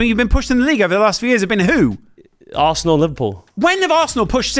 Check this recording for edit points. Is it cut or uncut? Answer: uncut